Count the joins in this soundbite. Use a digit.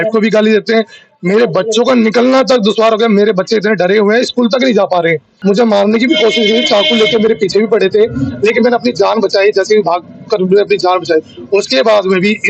1